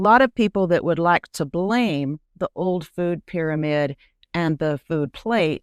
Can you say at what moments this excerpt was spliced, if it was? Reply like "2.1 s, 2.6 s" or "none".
none